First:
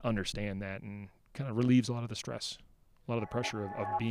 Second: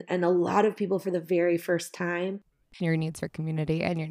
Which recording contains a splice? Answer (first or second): second